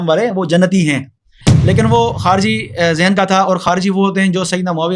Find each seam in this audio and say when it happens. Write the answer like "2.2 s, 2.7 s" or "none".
1.4 s

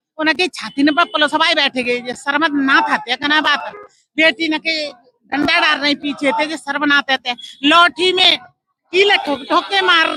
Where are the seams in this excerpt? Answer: none

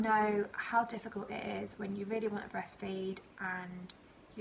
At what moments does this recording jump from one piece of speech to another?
none

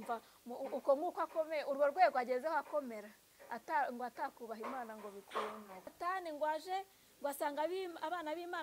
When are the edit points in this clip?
5.9 s

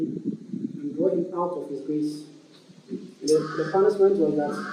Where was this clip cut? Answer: none

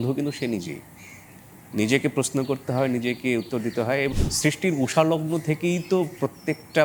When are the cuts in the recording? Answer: 4.1 s

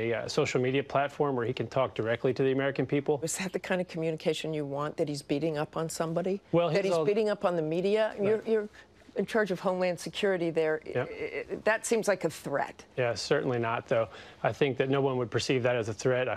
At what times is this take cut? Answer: 3.7 s

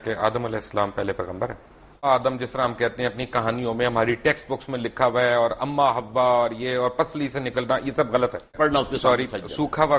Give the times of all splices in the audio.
2.0 s, 8.5 s

